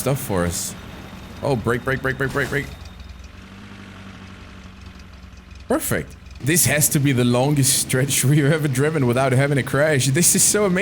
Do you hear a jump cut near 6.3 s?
yes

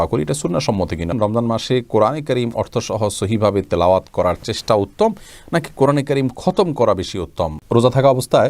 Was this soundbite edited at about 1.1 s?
yes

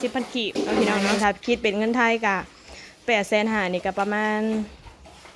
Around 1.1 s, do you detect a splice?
yes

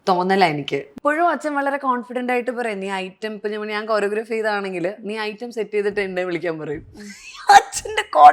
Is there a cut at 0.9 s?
yes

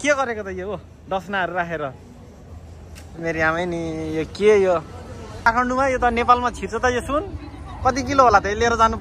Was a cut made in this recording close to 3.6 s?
no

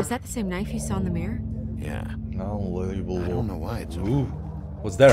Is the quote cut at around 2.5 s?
no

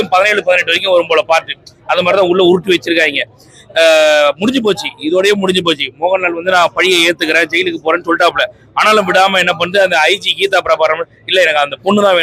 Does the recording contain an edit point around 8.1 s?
no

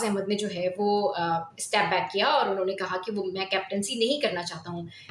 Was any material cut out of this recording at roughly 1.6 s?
yes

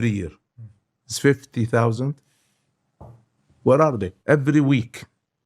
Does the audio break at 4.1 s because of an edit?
yes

